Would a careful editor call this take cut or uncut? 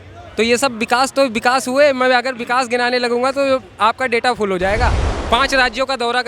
cut